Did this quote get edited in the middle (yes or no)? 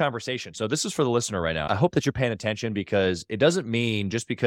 yes